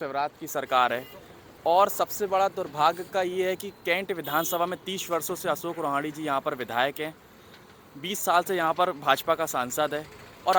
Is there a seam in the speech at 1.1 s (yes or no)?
no